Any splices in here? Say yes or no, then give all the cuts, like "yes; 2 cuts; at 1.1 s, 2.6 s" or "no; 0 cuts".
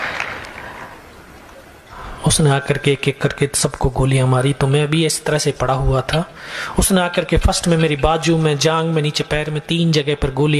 yes; 1 cut; at 2.1 s